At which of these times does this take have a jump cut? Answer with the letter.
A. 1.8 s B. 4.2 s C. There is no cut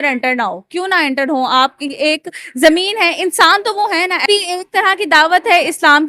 B